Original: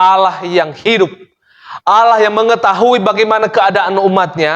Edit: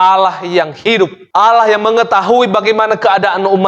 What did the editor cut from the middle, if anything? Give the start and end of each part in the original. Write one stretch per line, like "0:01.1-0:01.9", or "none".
0:01.2-0:01.7